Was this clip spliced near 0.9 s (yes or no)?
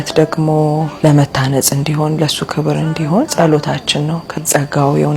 yes